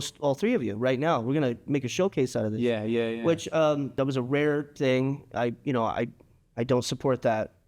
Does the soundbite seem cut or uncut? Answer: cut